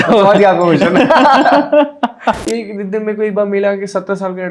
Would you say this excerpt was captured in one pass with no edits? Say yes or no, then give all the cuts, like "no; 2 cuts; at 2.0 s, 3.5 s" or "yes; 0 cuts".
no; 1 cut; at 2.4 s